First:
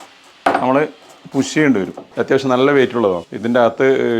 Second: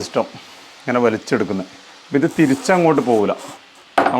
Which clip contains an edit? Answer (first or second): first